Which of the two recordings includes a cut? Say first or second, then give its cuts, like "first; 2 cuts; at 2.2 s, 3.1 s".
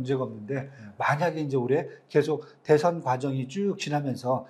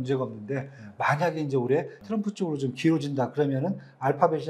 second; 1 cut; at 2.0 s